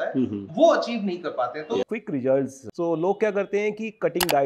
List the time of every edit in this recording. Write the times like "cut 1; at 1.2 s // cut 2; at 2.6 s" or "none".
cut 1; at 1.8 s // cut 2; at 2.6 s